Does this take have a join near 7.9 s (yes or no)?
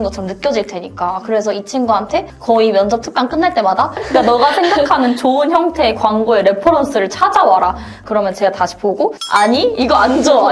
yes